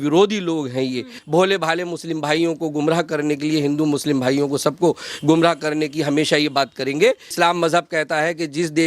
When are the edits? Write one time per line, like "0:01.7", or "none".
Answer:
0:01.2
0:07.3